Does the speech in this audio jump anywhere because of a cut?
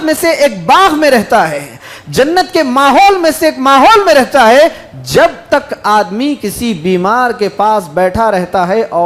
no; 0 cuts

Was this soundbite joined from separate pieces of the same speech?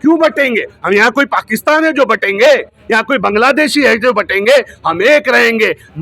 no; 0 cuts

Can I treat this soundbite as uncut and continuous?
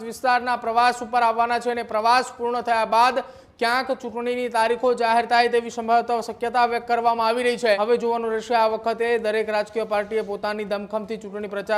no; 1 cut; at 7.8 s

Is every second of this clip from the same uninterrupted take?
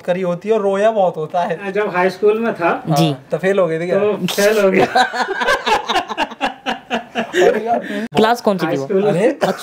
no; 2 cuts; at 1.6 s, 8.1 s

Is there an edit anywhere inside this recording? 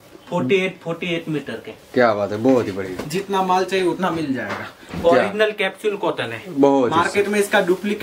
no; 0 cuts

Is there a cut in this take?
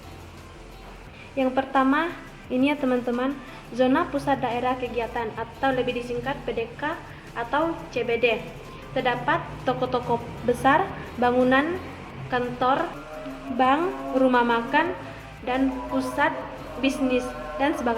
yes; 1 cut; at 13.0 s

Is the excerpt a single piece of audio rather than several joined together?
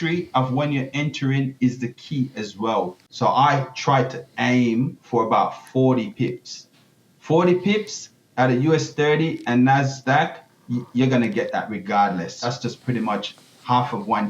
no; 2 cuts; at 3.0 s, 12.4 s

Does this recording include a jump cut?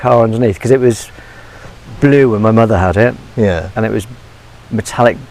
no; 0 cuts

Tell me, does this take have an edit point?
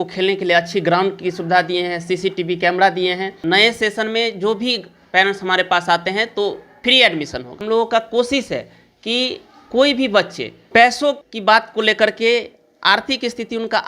yes; 3 cuts; at 3.3 s, 6.7 s, 7.5 s

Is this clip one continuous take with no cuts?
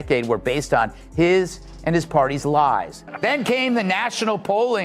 no; 1 cut; at 3.0 s

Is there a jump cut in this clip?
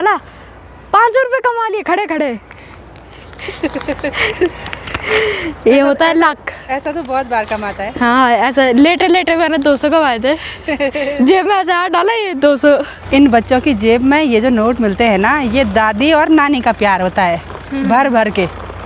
no; 0 cuts

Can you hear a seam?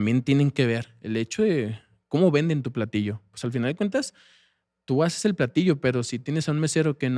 no; 0 cuts

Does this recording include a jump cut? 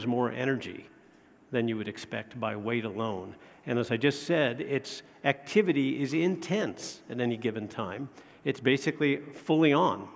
yes; 1 cut; at 3.3 s

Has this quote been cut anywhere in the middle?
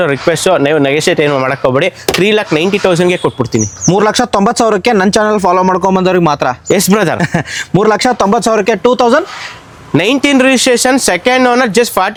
no; 0 cuts

